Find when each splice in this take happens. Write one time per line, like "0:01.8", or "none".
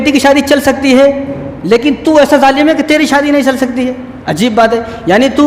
none